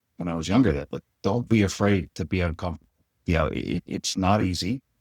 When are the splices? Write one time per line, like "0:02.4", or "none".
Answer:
0:02.1
0:03.1
0:03.9